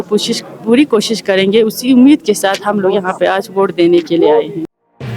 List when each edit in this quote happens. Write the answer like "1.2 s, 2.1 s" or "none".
none